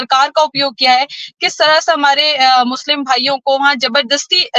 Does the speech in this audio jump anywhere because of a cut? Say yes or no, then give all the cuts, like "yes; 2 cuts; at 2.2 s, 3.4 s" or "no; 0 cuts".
no; 0 cuts